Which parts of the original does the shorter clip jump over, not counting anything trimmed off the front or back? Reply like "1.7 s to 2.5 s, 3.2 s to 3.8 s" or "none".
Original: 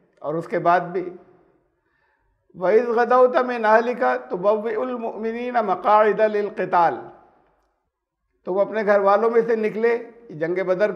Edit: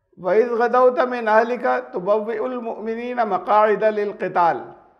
none